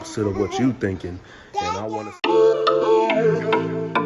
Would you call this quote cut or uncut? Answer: cut